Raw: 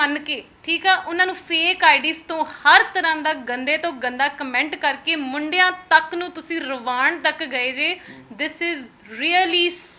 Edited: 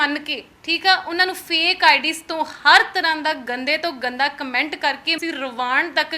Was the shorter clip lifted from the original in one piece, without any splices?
no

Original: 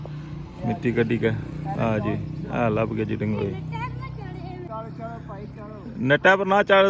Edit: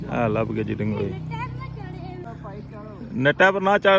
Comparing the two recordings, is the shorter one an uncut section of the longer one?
no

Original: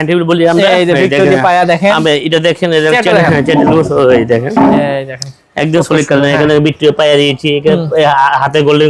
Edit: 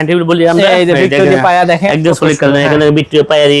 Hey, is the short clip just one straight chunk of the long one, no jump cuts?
no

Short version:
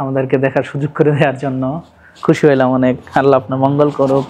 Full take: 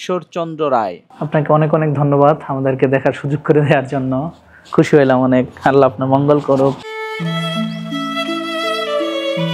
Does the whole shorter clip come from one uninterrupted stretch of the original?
yes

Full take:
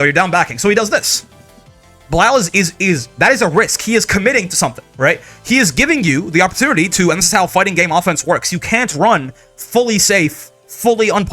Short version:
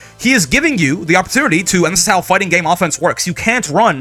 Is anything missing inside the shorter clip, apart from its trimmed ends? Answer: no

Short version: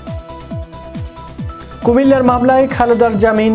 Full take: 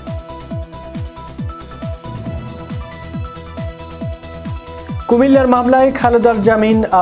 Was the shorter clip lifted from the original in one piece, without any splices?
no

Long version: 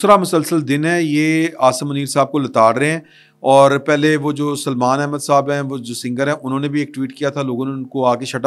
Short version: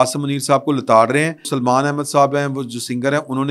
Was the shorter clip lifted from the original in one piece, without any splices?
no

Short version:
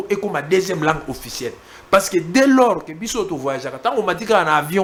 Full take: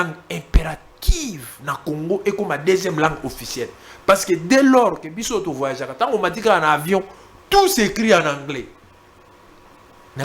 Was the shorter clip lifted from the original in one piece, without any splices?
yes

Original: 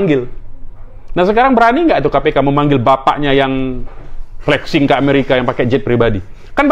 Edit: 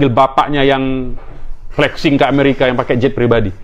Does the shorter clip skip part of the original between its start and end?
no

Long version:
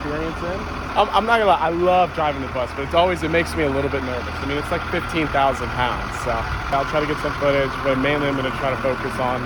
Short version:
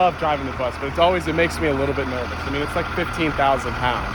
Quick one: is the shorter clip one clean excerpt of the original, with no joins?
yes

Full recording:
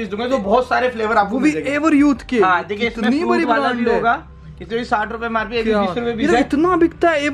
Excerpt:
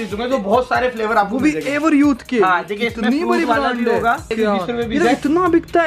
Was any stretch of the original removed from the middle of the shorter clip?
yes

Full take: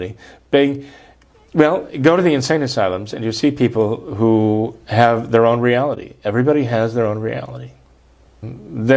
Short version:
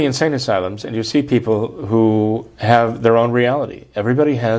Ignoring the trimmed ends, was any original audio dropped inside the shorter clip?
no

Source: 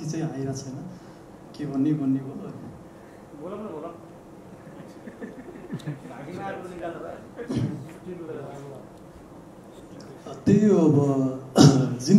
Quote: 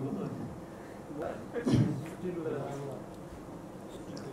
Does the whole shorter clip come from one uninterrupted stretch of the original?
no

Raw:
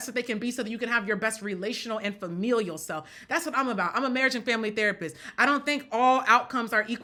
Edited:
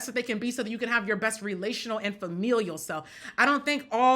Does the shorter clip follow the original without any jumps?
no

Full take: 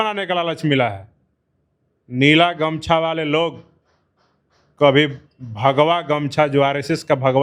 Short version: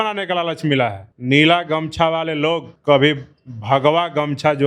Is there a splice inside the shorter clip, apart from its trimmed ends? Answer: yes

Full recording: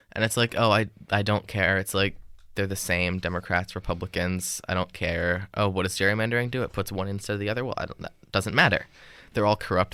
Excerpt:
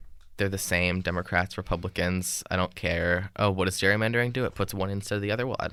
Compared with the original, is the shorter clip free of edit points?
yes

